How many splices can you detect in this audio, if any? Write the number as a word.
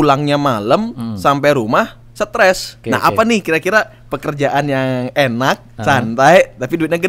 one